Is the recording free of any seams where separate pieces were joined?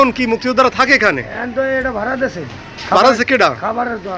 yes; 0 cuts

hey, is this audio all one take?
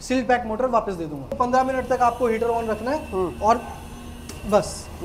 no; 1 cut; at 1.3 s

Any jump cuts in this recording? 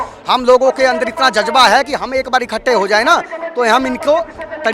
no; 0 cuts

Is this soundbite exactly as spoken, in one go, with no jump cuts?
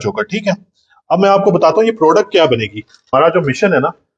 no; 1 cut; at 3.1 s

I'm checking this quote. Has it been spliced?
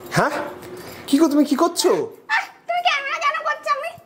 no; 0 cuts

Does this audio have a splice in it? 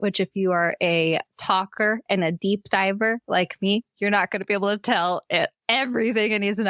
no; 0 cuts

